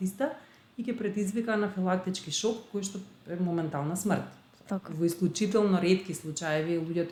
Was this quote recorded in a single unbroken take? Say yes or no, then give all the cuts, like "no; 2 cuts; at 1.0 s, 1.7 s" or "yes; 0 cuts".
yes; 0 cuts